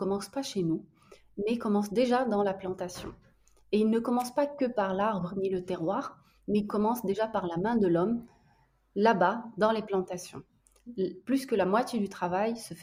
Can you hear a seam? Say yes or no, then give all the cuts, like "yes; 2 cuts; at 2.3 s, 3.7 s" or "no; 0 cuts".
no; 0 cuts